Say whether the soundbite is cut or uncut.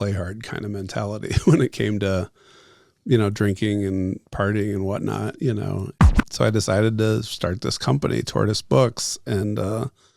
cut